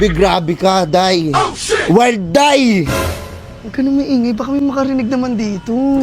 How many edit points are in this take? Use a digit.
0